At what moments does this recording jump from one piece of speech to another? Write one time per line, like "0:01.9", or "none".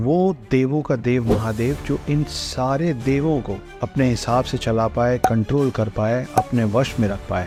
none